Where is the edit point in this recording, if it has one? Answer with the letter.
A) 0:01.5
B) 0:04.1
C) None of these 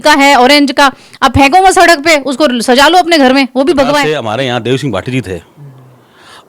B